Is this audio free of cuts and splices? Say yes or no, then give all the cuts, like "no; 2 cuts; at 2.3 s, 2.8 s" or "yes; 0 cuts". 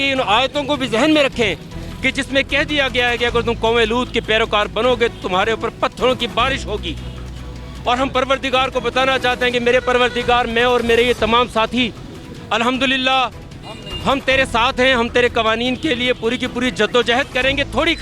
yes; 0 cuts